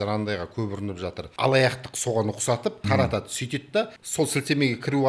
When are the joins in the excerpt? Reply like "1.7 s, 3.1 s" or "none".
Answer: 1.2 s, 2.8 s, 4.0 s